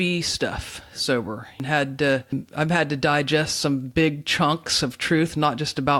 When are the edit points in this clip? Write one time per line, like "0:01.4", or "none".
0:01.5
0:02.3